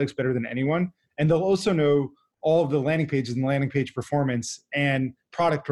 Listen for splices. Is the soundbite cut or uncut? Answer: uncut